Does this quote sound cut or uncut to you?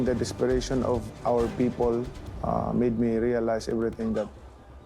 cut